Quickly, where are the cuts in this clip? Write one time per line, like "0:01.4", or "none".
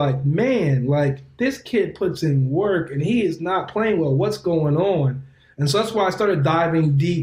none